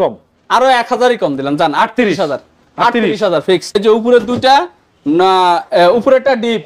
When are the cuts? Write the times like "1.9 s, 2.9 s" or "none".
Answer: 3.7 s